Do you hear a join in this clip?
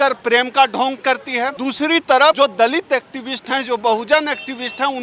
yes; 2 cuts; at 1.6 s, 2.4 s

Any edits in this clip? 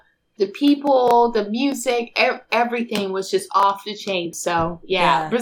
yes; 1 cut; at 4.3 s

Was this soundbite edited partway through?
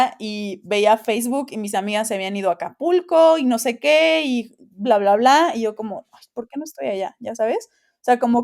no; 0 cuts

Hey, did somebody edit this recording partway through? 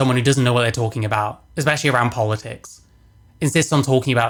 no; 0 cuts

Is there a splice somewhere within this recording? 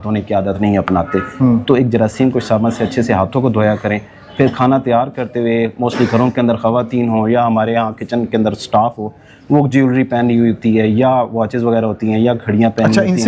no; 0 cuts

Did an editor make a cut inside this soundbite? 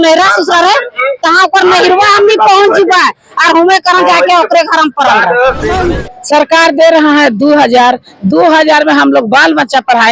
yes; 1 cut; at 5.9 s

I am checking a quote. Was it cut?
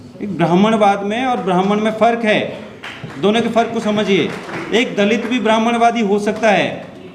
no; 0 cuts

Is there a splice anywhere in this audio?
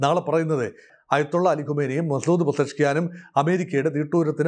yes; 1 cut; at 0.9 s

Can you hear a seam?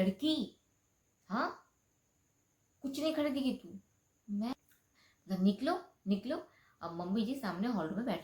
yes; 1 cut; at 4.5 s

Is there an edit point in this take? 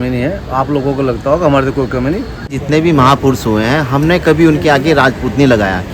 yes; 1 cut; at 2.4 s

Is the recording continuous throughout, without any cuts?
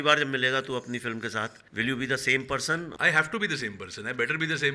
no; 2 cuts; at 1.6 s, 2.9 s

